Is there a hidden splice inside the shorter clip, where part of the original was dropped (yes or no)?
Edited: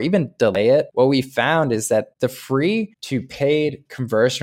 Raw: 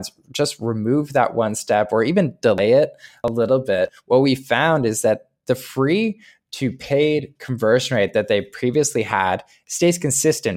yes